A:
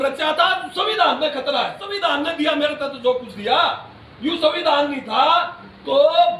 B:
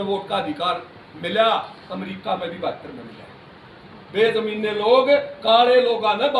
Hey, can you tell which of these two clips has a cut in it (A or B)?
A